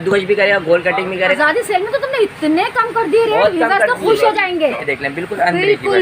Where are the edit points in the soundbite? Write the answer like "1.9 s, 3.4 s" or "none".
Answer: 1.4 s, 4.8 s